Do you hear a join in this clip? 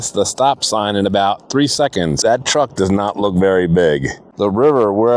yes; 2 cuts; at 2.1 s, 4.2 s

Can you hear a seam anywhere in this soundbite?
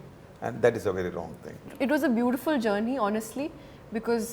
yes; 1 cut; at 1.6 s

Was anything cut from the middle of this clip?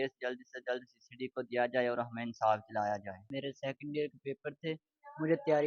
yes; 1 cut; at 3.3 s

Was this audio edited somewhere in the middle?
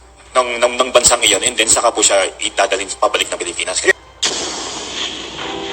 yes; 1 cut; at 3.9 s

